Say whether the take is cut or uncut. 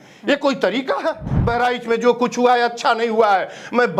cut